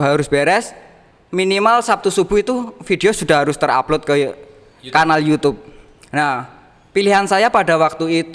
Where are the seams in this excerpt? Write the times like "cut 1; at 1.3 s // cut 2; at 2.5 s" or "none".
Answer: none